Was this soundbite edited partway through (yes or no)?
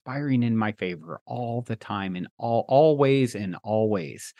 no